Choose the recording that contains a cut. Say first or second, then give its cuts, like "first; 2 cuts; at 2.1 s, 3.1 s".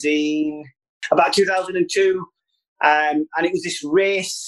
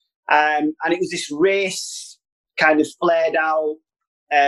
first; 1 cut; at 0.9 s